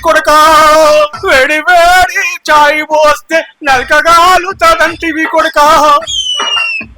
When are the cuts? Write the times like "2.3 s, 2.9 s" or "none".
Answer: 1.2 s